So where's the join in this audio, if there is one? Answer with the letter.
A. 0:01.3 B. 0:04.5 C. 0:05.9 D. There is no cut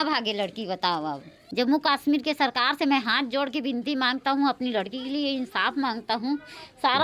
A